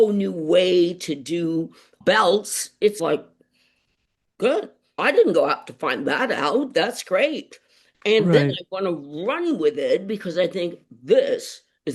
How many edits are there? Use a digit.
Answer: 2